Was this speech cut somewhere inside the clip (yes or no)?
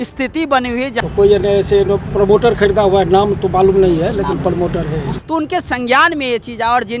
yes